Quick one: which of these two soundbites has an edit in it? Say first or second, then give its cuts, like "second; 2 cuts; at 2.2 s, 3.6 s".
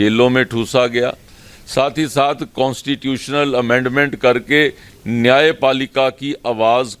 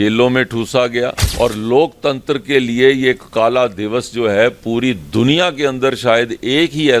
second; 1 cut; at 1.2 s